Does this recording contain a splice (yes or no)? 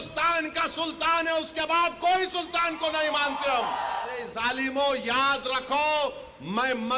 yes